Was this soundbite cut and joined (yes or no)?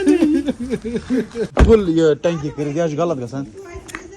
yes